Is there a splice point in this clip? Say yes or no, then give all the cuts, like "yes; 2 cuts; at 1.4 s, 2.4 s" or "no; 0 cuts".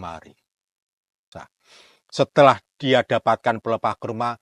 yes; 1 cut; at 1.3 s